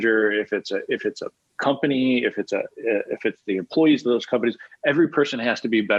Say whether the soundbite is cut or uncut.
uncut